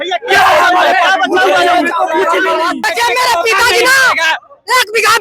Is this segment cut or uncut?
cut